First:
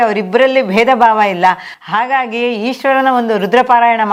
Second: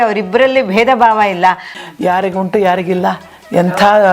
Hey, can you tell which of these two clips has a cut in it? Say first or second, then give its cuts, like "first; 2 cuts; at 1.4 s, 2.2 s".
second; 1 cut; at 1.8 s